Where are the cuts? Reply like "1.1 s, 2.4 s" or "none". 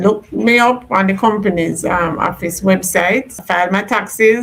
3.4 s